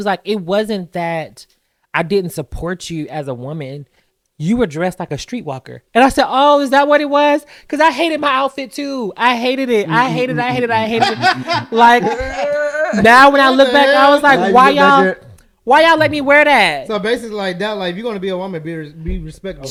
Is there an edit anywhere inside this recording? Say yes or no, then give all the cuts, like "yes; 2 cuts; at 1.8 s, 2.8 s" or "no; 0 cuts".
no; 0 cuts